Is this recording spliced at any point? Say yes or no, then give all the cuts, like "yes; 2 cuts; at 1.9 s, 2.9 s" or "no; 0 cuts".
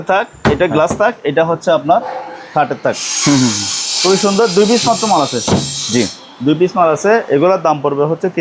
no; 0 cuts